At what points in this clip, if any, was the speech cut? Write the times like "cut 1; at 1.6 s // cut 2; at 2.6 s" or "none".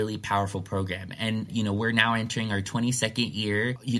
cut 1; at 1.5 s

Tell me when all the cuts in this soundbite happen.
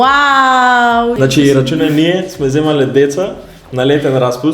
cut 1; at 1.2 s

